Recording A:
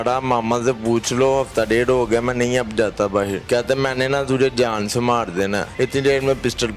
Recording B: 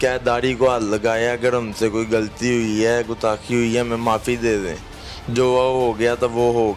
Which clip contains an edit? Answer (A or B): A